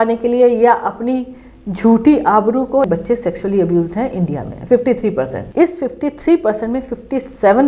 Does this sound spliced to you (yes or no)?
yes